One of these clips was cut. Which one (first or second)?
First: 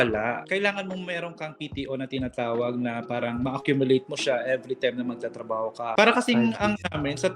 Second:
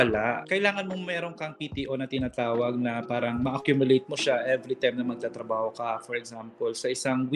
first